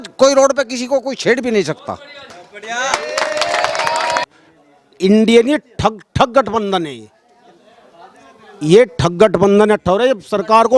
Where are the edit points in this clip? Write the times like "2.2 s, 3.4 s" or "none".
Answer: 4.3 s

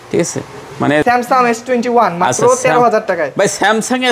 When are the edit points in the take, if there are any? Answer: 1.0 s

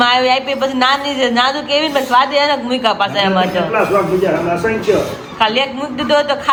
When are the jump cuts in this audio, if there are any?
none

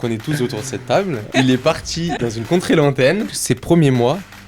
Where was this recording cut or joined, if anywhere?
1.3 s, 2.2 s, 3.3 s

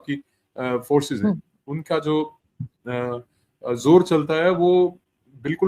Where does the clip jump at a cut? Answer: none

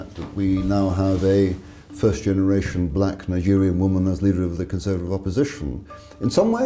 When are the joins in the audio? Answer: none

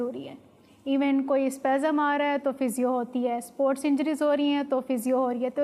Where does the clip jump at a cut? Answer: none

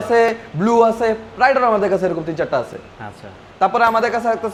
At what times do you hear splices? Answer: none

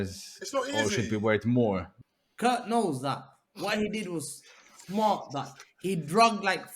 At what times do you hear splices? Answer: 1.9 s

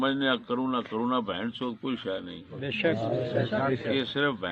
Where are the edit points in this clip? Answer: none

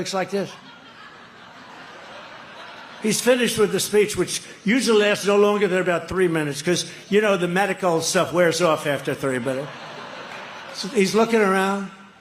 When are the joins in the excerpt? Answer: none

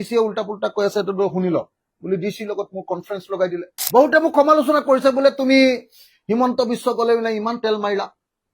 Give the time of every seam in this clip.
3.7 s

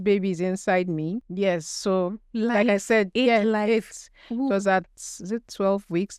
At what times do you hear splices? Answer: 1.3 s

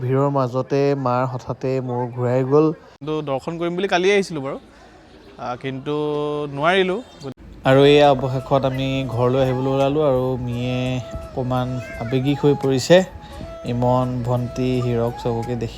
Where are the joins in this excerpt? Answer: 3.0 s, 7.3 s

